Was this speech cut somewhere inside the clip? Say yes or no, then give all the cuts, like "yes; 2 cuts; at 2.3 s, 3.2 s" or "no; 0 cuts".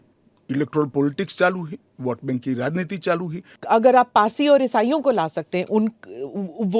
yes; 1 cut; at 3.5 s